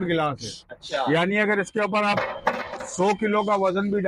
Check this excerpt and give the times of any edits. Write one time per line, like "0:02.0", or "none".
none